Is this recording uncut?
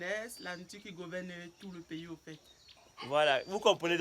no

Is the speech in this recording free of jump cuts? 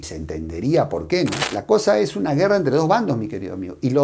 no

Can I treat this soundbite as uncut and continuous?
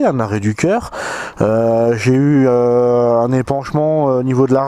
yes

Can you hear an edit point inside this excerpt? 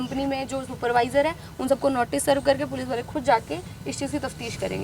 no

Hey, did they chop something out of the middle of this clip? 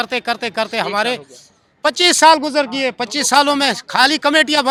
no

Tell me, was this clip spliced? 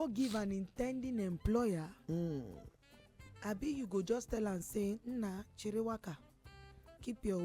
no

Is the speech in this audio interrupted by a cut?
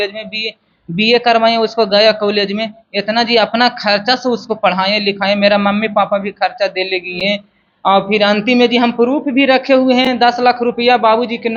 no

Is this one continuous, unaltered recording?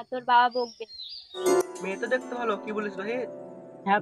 no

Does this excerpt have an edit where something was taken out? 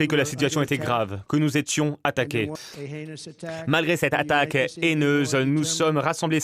yes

